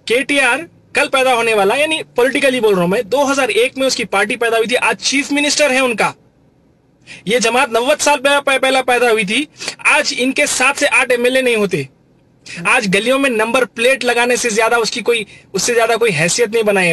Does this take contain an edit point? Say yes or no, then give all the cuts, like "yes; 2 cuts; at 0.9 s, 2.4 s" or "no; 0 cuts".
no; 0 cuts